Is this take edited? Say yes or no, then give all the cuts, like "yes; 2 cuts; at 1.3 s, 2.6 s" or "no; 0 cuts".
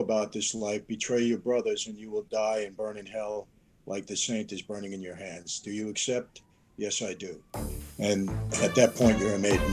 no; 0 cuts